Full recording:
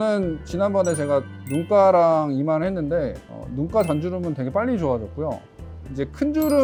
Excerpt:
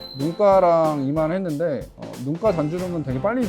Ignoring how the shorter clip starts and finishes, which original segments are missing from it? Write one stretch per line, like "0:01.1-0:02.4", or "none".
none